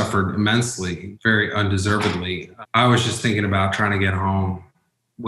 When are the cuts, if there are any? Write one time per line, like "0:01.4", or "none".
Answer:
0:01.0
0:02.5